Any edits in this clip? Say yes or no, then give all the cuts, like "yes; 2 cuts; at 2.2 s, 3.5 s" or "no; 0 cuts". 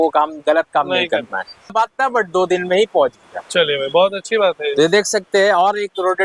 yes; 1 cut; at 1.7 s